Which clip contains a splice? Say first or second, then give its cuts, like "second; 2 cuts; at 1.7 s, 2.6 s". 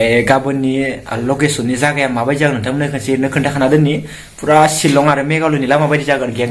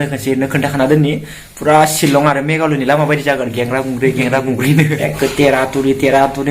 second; 1 cut; at 4.9 s